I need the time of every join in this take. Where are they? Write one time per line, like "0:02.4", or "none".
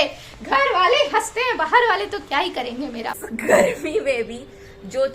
0:03.2